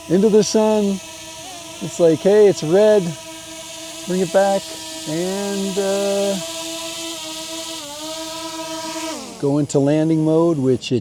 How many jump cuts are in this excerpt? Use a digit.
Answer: 0